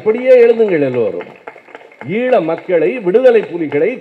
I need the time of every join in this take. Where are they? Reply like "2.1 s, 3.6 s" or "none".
none